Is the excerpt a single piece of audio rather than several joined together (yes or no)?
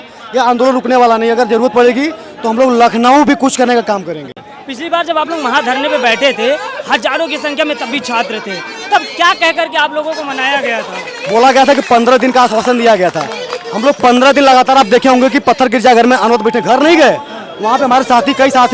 yes